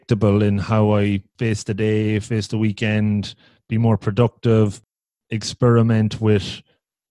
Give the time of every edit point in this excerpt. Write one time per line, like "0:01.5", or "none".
0:01.3